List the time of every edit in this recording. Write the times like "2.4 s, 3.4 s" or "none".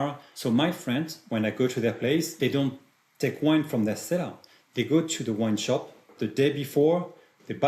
1.2 s, 2.3 s, 6.1 s